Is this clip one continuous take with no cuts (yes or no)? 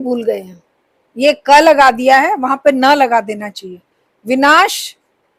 yes